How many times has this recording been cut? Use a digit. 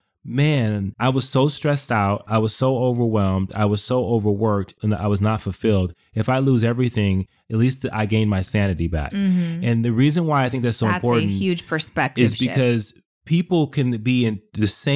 1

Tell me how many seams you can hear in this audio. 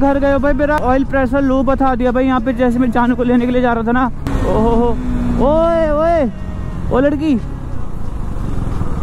2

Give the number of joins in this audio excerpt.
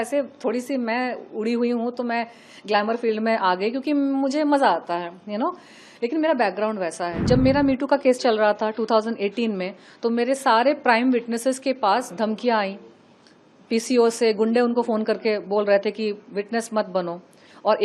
1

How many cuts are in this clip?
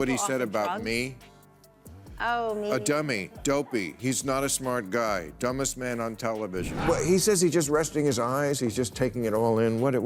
1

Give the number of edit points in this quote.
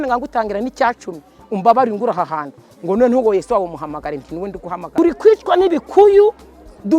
1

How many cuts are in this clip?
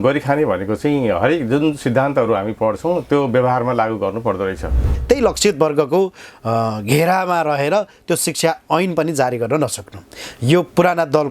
1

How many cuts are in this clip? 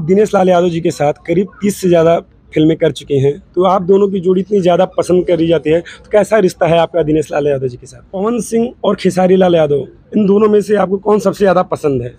1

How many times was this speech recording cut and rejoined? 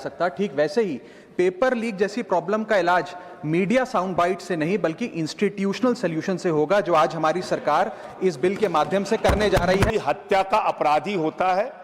1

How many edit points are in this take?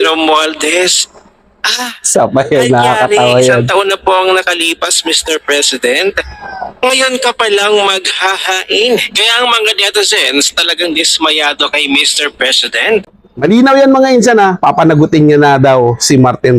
1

